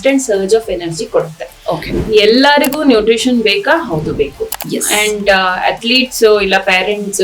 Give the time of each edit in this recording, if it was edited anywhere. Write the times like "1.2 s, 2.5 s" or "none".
1.9 s